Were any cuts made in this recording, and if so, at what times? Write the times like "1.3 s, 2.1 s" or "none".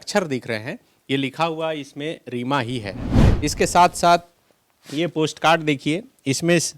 3.2 s